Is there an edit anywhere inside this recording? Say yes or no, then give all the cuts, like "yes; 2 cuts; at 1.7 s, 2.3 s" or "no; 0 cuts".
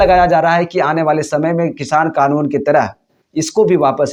no; 0 cuts